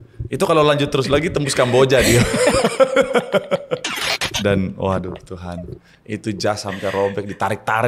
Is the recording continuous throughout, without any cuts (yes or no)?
no